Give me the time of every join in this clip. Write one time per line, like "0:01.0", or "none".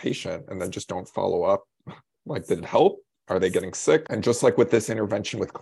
0:04.0